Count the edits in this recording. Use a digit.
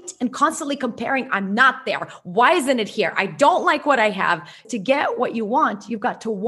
1